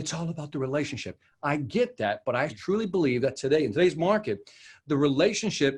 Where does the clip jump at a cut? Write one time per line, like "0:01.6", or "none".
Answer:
none